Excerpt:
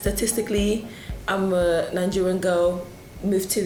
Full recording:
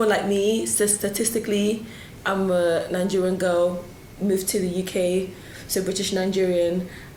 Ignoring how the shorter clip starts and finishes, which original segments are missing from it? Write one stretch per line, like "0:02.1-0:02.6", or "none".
none